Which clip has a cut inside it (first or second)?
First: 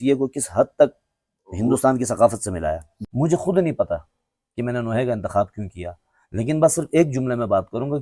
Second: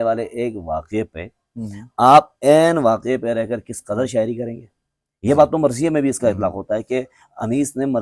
first